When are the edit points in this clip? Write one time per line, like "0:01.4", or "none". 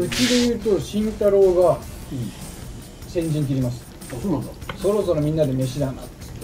none

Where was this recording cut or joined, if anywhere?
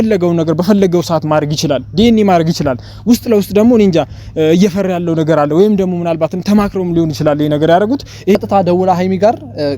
0:08.3

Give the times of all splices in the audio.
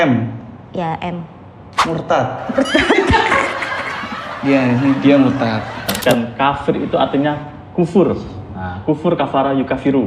0:05.9

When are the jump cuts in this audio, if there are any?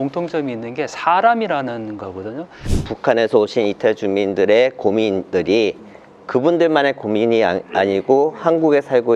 0:02.8

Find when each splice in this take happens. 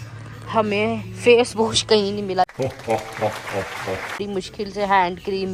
none

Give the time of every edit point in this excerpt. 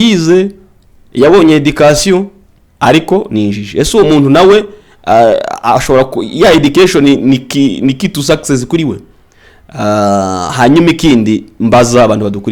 none

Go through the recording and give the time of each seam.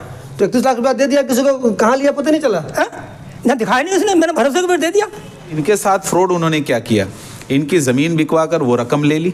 0:05.6

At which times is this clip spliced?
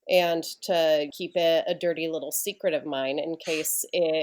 0:01.1

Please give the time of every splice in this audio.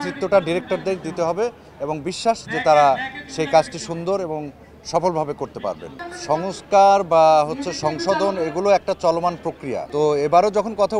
none

